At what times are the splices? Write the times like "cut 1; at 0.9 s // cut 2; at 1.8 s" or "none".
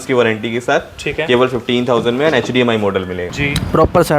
cut 1; at 3.2 s